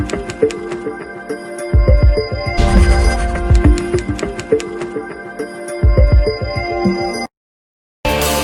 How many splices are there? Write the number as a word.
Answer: zero